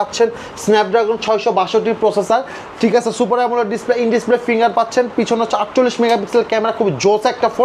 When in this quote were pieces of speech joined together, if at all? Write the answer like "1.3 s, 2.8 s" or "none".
none